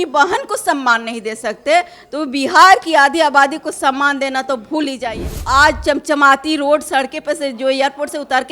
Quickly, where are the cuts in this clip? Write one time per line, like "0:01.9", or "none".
0:05.1